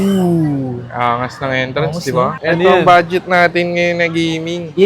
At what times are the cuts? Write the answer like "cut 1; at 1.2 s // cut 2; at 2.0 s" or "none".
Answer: cut 1; at 2.4 s